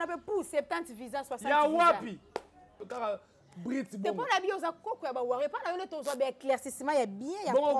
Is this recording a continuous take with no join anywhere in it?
no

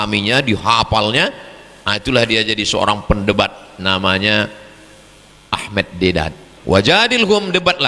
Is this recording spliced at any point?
yes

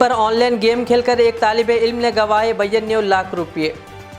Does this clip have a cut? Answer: no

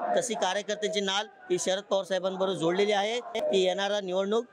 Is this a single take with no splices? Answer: yes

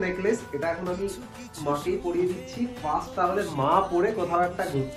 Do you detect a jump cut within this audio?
no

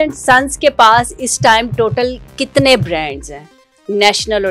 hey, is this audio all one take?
yes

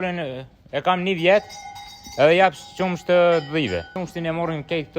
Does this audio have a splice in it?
yes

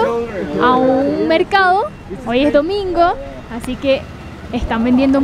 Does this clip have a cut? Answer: no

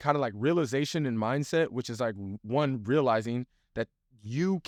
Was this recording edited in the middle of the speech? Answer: no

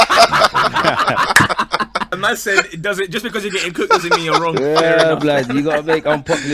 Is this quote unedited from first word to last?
no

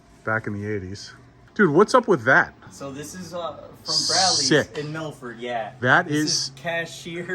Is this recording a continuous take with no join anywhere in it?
no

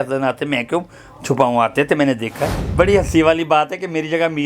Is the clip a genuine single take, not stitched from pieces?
no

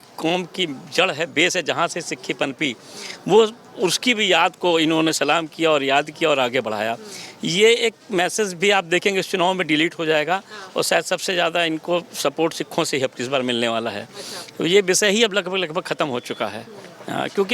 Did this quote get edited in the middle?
no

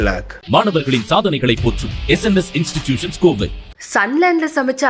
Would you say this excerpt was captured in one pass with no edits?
yes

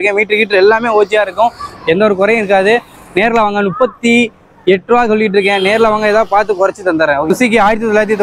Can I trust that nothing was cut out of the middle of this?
no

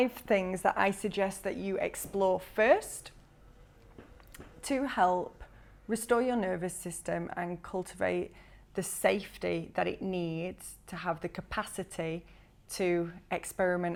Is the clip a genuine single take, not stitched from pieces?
yes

